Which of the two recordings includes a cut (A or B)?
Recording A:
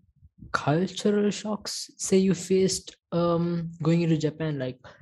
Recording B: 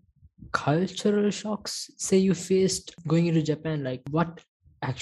B